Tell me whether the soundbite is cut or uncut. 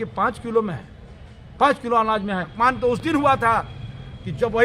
cut